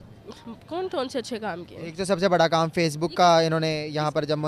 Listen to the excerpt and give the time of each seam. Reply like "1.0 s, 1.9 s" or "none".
none

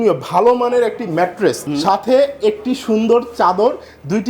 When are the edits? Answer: 1.7 s

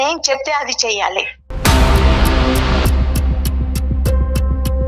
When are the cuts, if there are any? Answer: 1.4 s

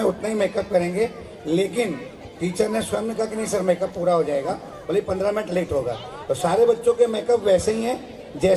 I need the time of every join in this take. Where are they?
none

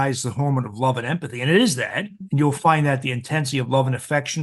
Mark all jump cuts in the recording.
none

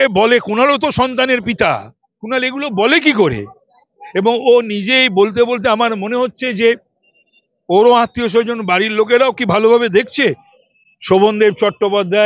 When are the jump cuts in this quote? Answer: 10.5 s

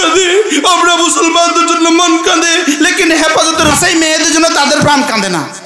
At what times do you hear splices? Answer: 3.7 s

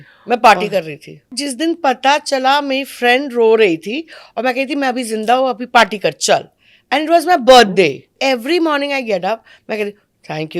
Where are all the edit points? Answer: 1.4 s, 8.1 s

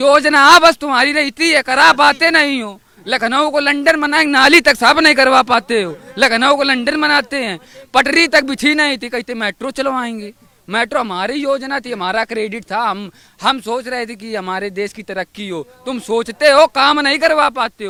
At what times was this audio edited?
none

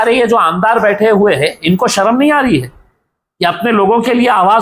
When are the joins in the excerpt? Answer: none

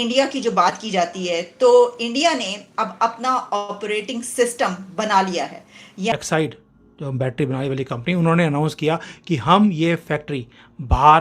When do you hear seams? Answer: 6.1 s

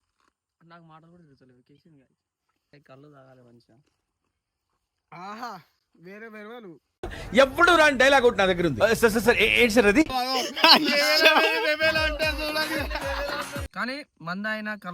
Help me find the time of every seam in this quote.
2.7 s, 13.7 s

